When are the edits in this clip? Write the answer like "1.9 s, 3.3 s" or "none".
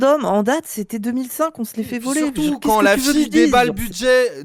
none